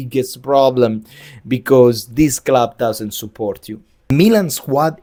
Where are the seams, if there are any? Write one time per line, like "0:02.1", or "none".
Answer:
none